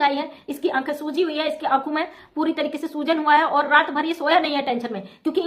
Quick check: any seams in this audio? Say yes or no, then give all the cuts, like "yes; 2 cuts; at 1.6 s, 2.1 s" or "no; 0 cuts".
no; 0 cuts